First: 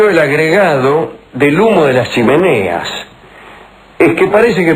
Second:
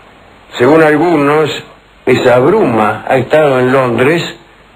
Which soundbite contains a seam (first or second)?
second